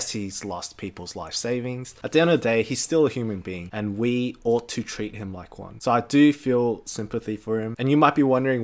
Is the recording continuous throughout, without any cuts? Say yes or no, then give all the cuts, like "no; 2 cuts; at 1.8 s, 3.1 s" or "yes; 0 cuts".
no; 2 cuts; at 1.9 s, 7.7 s